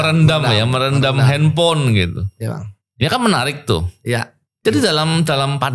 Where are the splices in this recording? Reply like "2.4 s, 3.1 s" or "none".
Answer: none